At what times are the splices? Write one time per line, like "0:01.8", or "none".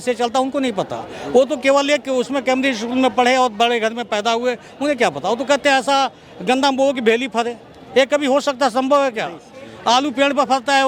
none